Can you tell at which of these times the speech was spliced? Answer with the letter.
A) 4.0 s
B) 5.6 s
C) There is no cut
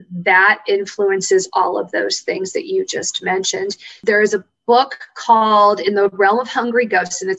A